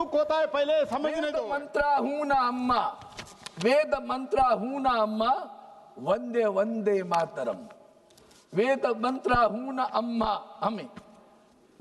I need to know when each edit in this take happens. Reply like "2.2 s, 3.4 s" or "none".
1.4 s